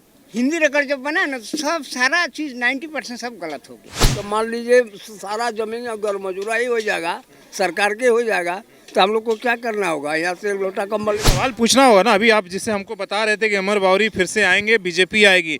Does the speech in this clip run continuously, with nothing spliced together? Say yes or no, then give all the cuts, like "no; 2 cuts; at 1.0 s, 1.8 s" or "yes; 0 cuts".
no; 1 cut; at 4.2 s